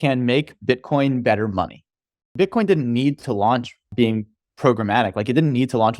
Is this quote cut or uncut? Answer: cut